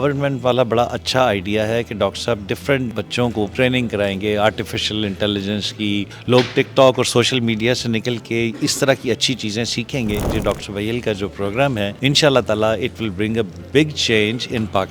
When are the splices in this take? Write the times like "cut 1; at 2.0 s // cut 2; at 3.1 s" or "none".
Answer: cut 1; at 3.3 s // cut 2; at 6.1 s // cut 3; at 10.3 s // cut 4; at 11.9 s